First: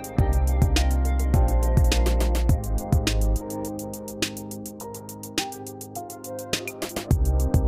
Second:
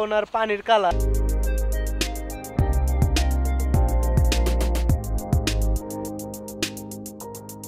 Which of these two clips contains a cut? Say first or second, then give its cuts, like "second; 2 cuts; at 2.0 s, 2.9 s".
second; 1 cut; at 0.9 s